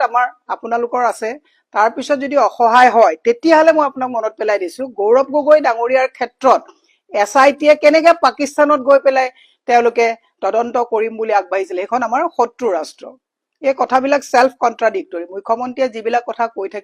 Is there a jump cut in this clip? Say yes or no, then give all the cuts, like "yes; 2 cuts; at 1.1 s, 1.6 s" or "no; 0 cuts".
no; 0 cuts